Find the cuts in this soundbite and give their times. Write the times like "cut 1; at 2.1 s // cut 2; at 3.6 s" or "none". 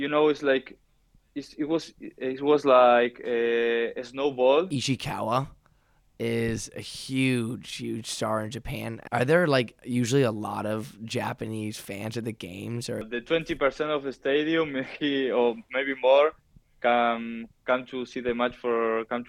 cut 1; at 4.7 s // cut 2; at 9.0 s // cut 3; at 13.0 s